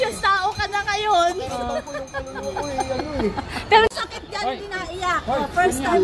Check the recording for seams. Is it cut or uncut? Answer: uncut